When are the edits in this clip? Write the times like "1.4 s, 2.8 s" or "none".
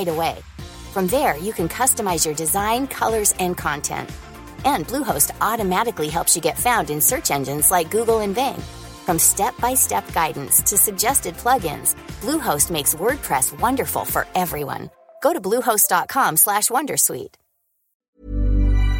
18.1 s

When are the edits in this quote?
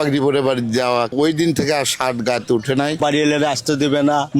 1.1 s, 3.0 s

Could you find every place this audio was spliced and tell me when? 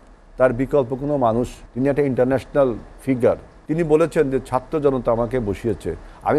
1.6 s, 3.5 s

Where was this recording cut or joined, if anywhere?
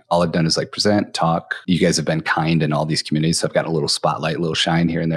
1.5 s

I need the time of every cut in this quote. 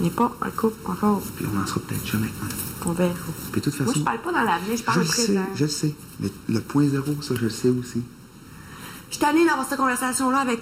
1.3 s

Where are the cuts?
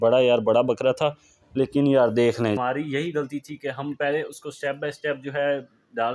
2.6 s

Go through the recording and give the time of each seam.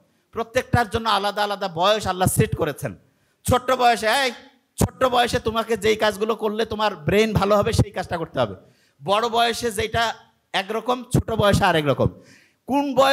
none

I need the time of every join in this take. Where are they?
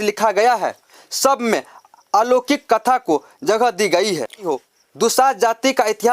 4.5 s

